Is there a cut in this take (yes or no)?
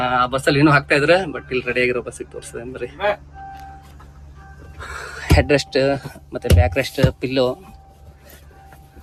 no